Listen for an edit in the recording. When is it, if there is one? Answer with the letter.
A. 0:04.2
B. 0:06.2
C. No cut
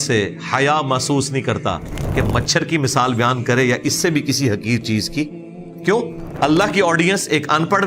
B